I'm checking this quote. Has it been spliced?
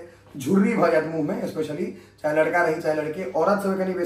no; 0 cuts

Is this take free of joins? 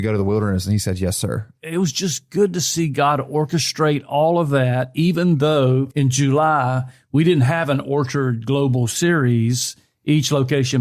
no; 2 cuts; at 1.5 s, 5.9 s

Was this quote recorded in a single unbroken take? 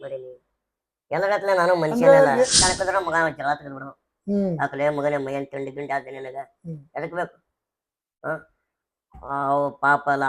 no; 1 cut; at 2.5 s

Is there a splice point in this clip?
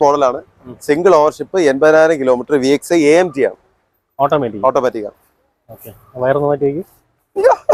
no; 0 cuts

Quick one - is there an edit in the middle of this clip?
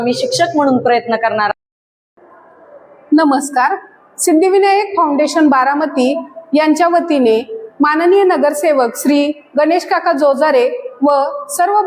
yes; 1 cut; at 1.5 s

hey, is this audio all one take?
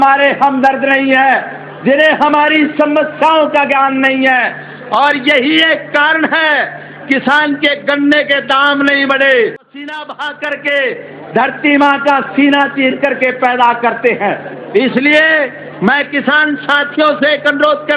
no; 1 cut; at 9.8 s

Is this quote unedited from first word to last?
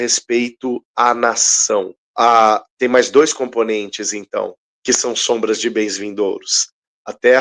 no; 2 cuts; at 2.0 s, 4.7 s

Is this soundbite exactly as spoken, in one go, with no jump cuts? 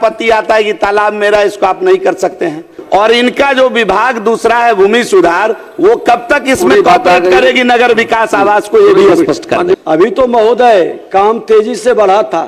no; 2 cuts; at 2.8 s, 9.8 s

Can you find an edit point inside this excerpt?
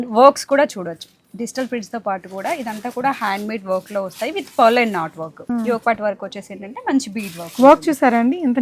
yes; 1 cut; at 5.5 s

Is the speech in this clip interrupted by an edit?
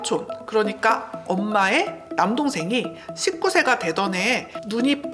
no; 0 cuts

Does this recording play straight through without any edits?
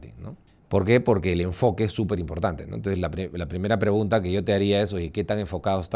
yes; 0 cuts

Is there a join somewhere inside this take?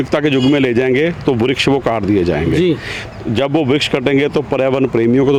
no; 0 cuts

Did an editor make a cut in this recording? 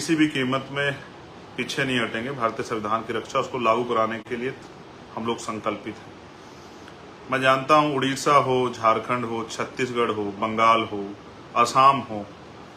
no; 0 cuts

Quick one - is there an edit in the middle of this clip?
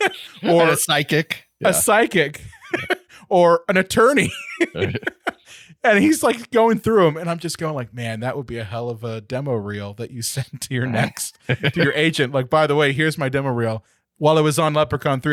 no; 0 cuts

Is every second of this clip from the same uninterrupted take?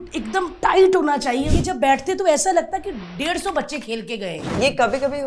no; 2 cuts; at 1.5 s, 4.5 s

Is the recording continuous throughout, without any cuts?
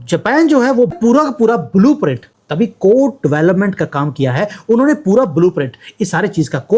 no; 1 cut; at 0.9 s

